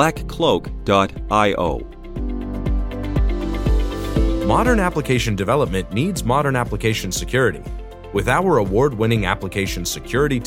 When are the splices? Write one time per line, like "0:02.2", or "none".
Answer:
0:02.0
0:04.4